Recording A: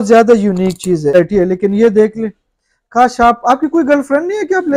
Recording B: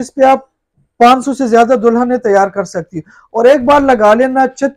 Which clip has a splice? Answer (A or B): A